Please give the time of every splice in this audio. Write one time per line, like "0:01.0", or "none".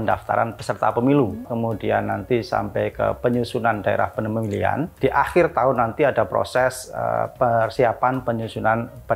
0:01.5
0:04.9